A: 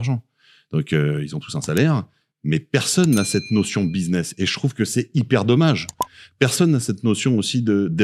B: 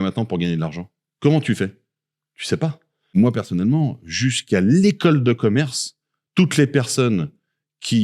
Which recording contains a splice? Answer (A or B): B